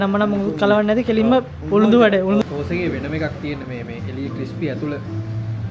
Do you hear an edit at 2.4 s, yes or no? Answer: yes